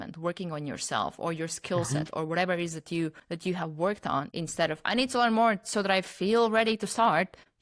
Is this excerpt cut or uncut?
cut